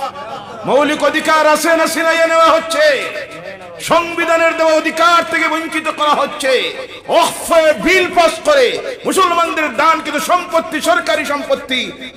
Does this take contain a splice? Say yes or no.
no